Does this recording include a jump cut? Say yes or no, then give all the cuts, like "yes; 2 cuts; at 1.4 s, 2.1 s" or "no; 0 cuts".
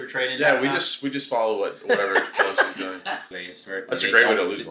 yes; 1 cut; at 3.4 s